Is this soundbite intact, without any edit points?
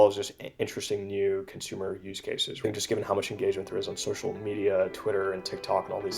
no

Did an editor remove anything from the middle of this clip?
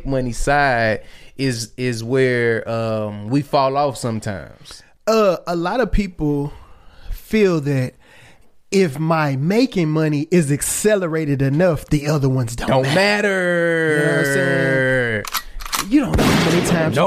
no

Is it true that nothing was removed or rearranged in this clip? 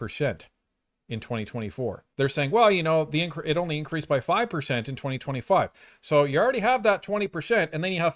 no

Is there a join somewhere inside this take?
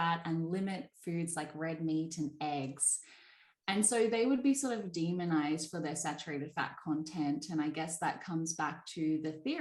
no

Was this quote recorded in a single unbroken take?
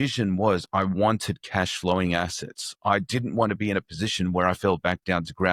yes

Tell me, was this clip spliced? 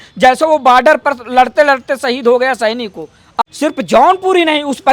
yes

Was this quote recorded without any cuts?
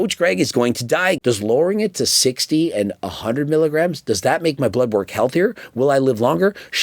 no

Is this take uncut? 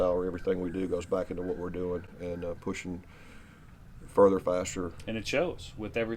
yes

